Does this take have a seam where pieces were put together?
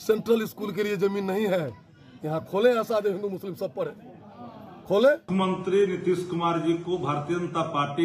yes; 1 cut; at 5.3 s

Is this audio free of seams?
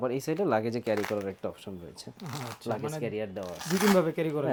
yes; 0 cuts

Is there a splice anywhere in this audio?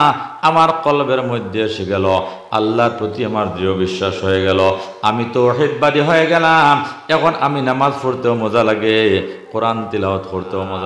no; 0 cuts

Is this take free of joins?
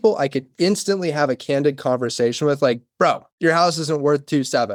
yes; 0 cuts

